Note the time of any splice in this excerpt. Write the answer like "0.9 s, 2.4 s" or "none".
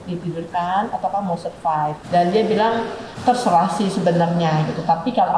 2.0 s, 3.0 s